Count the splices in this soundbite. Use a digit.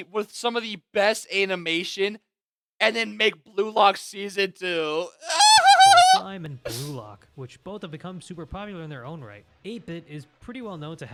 0